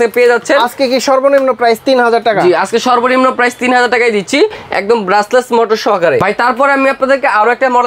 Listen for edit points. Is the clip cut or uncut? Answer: uncut